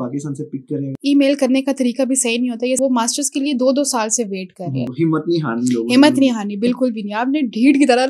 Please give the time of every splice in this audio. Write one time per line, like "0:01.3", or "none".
0:00.9
0:02.8
0:04.9